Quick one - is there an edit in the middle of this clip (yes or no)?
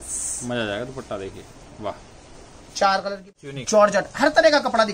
yes